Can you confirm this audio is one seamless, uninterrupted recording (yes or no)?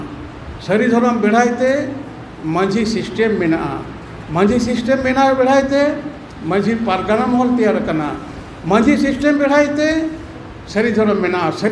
yes